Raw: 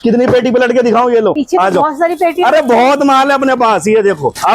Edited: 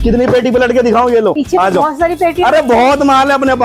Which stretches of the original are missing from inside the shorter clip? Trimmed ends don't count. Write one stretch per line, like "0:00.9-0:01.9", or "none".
none